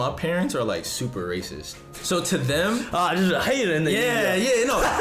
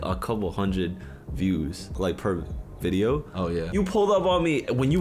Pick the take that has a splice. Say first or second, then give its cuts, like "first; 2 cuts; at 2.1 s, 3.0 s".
second; 2 cuts; at 1.9 s, 3.7 s